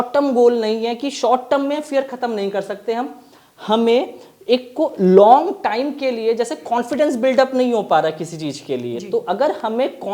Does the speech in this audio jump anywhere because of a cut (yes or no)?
no